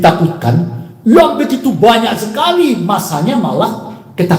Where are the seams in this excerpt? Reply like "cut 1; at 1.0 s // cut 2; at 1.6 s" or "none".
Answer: none

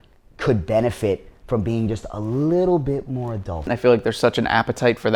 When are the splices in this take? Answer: cut 1; at 3.7 s

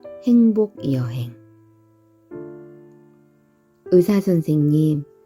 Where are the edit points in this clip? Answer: cut 1; at 1.4 s // cut 2; at 3.9 s

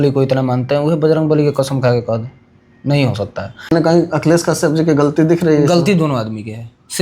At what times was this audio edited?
cut 1; at 3.7 s

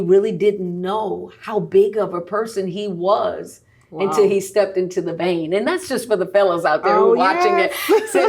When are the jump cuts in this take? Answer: none

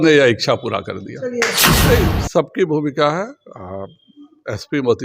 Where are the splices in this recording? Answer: cut 1; at 1.7 s

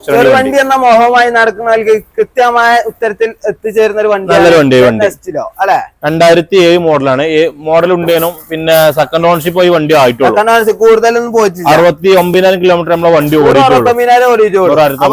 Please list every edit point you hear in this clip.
none

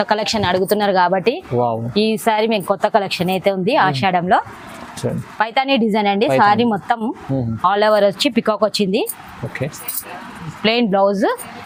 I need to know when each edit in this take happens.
none

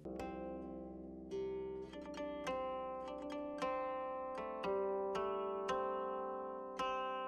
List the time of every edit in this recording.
none

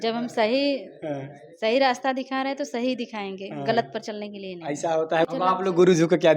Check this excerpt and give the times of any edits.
cut 1; at 5.3 s

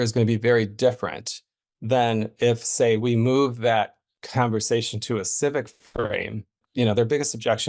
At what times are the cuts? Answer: cut 1; at 6.6 s

